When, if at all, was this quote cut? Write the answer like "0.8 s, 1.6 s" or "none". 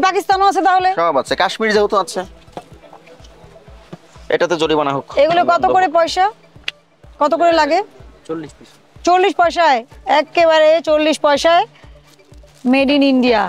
none